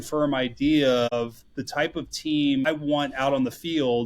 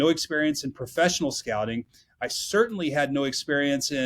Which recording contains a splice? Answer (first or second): first